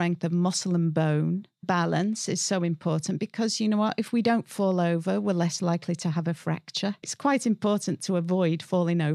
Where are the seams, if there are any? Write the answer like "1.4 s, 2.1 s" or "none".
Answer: 1.6 s, 7.1 s